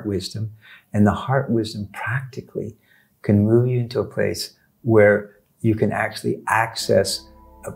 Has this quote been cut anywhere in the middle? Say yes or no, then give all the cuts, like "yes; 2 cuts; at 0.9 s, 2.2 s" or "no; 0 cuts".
no; 0 cuts